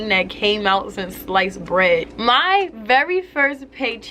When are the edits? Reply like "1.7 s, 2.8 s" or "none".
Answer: 2.1 s